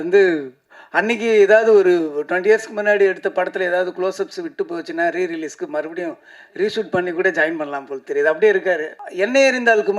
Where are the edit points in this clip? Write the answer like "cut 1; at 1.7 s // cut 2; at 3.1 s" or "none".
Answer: cut 1; at 9.0 s

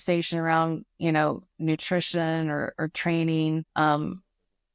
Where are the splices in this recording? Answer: cut 1; at 3.7 s

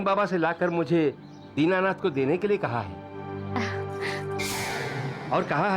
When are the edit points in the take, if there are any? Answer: none

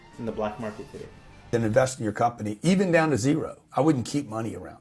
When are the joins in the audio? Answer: cut 1; at 1.5 s

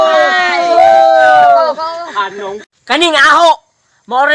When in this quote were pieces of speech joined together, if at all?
cut 1; at 2.7 s

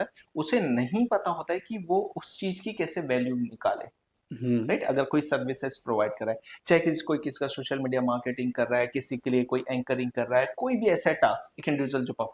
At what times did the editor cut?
none

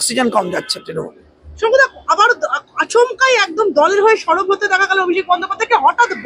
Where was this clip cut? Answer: none

